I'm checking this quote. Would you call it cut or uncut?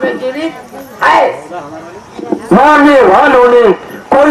cut